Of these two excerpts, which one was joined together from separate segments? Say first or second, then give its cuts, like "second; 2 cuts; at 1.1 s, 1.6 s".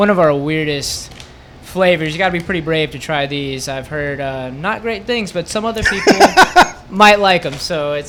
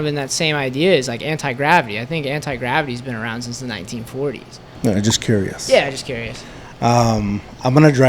second; 1 cut; at 4.6 s